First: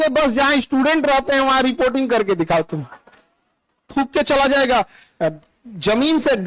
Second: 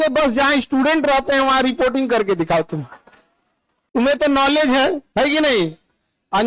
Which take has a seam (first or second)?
first